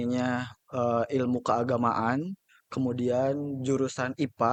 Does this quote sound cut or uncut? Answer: uncut